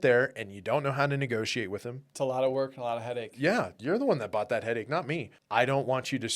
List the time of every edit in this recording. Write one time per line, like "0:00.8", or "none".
0:02.0
0:05.3